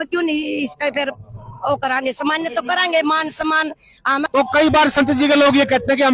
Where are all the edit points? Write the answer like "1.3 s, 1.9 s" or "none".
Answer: 4.3 s